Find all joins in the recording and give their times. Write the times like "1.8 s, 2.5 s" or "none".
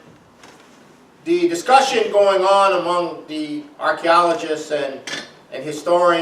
1.8 s